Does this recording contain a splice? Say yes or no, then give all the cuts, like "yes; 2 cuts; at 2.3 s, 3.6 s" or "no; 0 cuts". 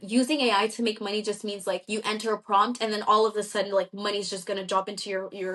no; 0 cuts